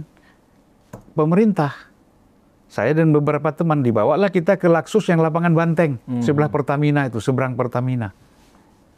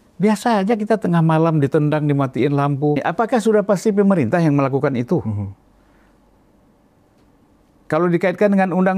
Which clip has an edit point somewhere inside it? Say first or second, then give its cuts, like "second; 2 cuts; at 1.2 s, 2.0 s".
second; 1 cut; at 3.0 s